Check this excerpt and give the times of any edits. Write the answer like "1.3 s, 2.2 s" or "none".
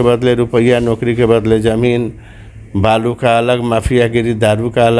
none